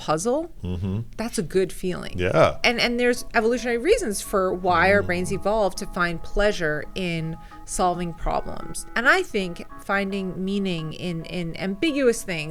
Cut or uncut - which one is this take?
cut